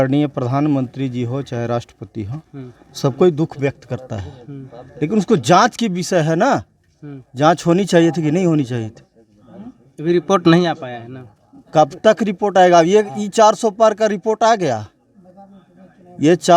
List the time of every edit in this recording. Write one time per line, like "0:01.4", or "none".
none